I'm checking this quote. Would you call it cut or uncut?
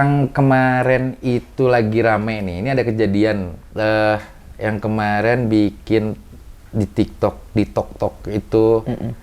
uncut